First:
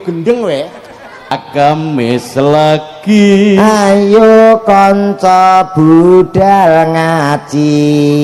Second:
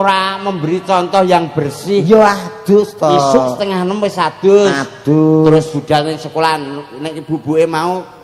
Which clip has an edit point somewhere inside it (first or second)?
first